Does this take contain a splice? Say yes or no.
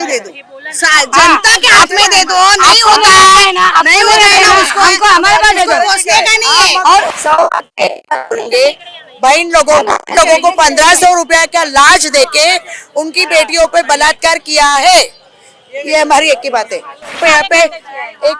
yes